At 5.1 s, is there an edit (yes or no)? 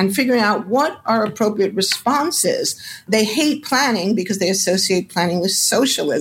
no